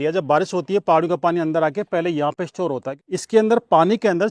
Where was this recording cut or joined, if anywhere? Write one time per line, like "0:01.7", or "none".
0:02.9